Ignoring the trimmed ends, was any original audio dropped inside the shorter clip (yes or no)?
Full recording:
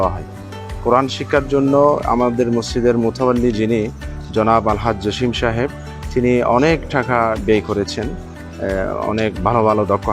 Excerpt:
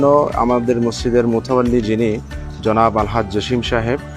no